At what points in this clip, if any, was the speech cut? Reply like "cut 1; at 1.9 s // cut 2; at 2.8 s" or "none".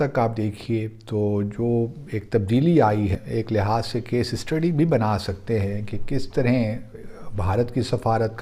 cut 1; at 3.2 s